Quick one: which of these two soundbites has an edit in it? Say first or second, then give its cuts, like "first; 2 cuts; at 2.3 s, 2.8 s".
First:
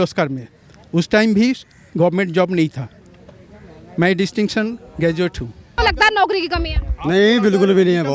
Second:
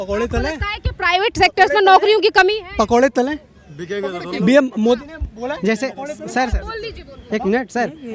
first; 1 cut; at 5.8 s